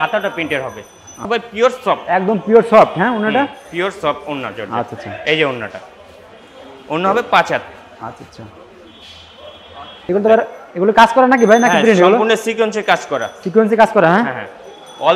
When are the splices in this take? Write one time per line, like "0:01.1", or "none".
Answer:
0:01.3
0:10.1